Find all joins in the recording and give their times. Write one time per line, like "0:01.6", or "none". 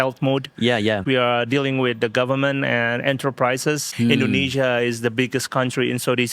0:01.0
0:03.9